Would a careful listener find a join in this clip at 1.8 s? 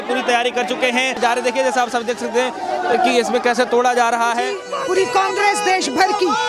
no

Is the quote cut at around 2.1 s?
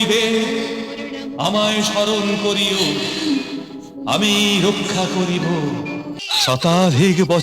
no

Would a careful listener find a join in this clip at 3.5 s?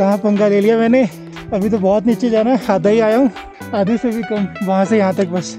no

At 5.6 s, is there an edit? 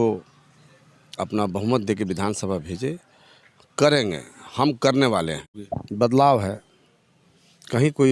yes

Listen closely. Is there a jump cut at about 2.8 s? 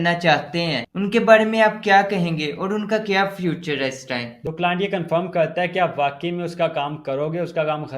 no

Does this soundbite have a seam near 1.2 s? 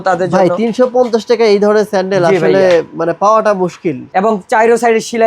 no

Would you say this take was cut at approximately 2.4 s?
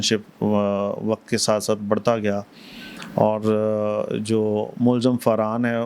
no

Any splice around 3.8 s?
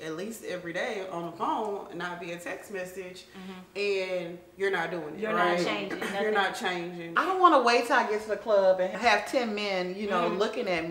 no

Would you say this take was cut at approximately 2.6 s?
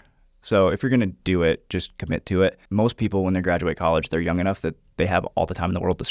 yes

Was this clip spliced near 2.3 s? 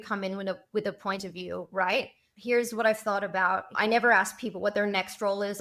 yes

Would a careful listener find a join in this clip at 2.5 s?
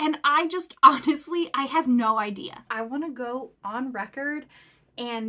yes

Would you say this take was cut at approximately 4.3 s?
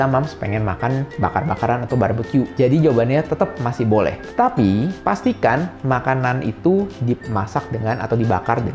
no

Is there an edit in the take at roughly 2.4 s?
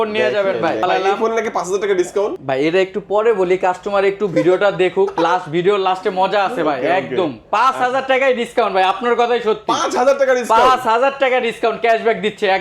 yes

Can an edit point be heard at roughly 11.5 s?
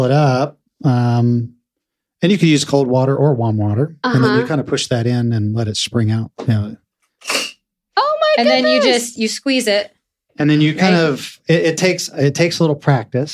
no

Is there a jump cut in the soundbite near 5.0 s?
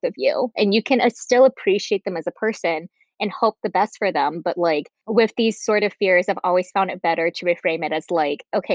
yes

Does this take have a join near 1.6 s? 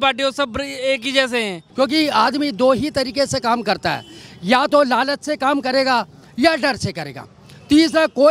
yes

